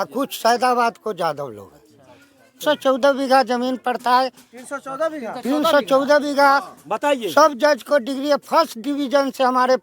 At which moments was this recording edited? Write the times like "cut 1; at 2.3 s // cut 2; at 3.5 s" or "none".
cut 1; at 2.6 s